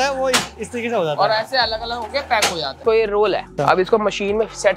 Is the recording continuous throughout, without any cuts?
no; 2 cuts; at 2.8 s, 3.5 s

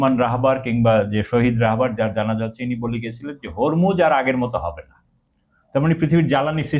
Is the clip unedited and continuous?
yes; 0 cuts

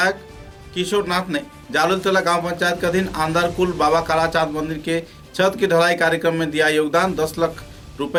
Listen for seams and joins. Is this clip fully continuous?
yes; 0 cuts

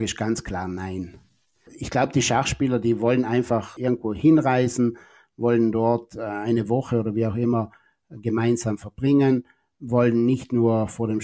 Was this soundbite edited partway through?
yes; 2 cuts; at 1.8 s, 3.7 s

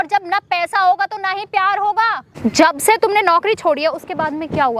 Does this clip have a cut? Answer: yes; 1 cut; at 2.2 s

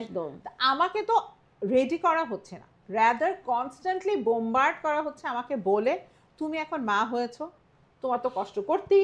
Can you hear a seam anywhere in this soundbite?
no; 0 cuts

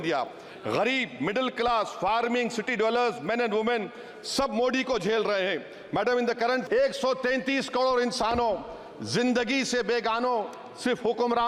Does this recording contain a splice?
yes; 1 cut; at 6.6 s

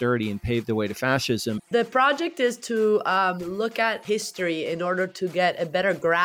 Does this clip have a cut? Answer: yes; 2 cuts; at 1.6 s, 4.0 s

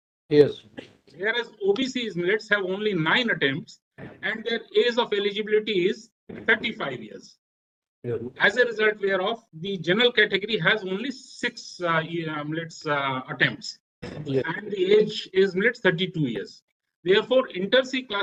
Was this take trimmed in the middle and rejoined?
no; 0 cuts

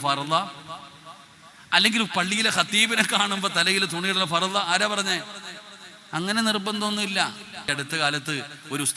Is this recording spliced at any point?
yes; 1 cut; at 7.8 s

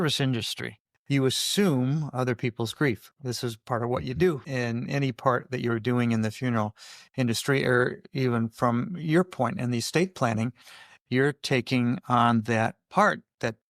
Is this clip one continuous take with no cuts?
no; 1 cut; at 0.9 s

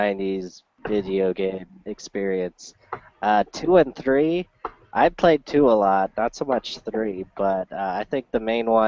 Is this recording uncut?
no; 1 cut; at 6.8 s

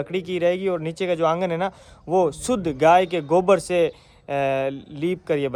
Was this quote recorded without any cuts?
yes; 0 cuts

